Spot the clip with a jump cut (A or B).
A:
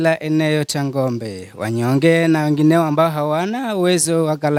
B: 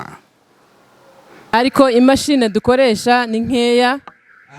B